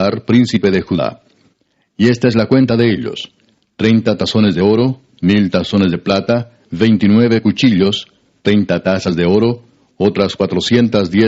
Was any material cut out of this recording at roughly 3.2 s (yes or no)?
no